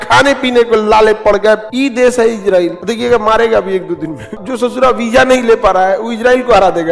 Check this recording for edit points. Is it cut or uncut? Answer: cut